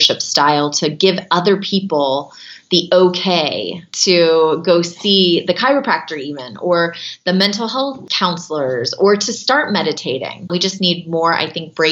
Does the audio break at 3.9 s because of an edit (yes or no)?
yes